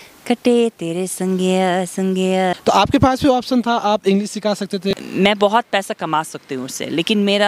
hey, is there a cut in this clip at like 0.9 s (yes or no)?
no